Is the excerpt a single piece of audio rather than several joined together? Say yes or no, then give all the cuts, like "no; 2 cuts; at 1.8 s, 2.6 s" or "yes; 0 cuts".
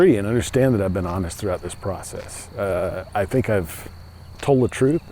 yes; 0 cuts